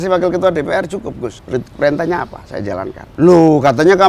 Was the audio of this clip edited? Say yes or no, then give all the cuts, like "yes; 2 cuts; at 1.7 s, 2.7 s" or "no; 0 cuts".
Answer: yes; 2 cuts; at 1.4 s, 3.0 s